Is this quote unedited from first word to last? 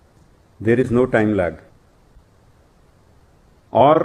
yes; 0 cuts

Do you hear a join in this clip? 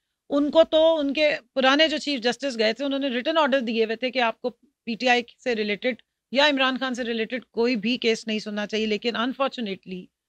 no; 0 cuts

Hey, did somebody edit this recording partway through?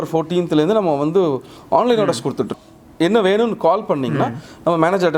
yes; 1 cut; at 2.6 s

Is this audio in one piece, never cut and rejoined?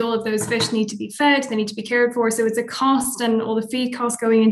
yes; 0 cuts

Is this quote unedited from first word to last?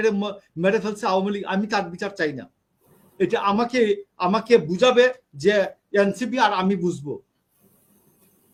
yes; 0 cuts

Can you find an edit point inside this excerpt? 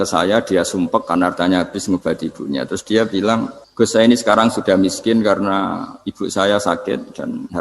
yes; 1 cut; at 3.6 s

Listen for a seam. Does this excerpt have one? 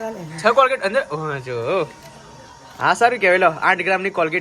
no; 0 cuts

